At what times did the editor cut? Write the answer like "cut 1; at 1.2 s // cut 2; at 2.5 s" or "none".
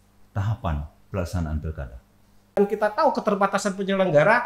cut 1; at 2.6 s